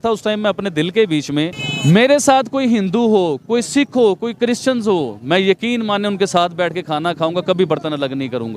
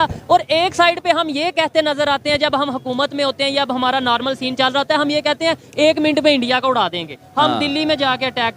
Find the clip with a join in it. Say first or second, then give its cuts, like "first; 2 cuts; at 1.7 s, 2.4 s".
first; 1 cut; at 1.6 s